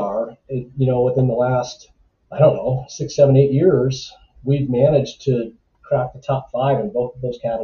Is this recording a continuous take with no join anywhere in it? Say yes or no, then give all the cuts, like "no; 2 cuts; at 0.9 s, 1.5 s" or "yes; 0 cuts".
yes; 0 cuts